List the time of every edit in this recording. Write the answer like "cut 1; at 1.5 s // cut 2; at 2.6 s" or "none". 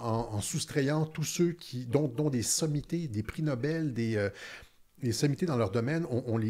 none